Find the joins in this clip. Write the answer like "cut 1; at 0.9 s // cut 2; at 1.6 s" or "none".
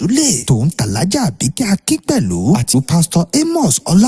cut 1; at 2.1 s